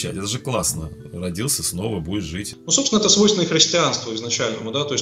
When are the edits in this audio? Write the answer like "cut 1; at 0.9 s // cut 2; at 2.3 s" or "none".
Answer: cut 1; at 2.5 s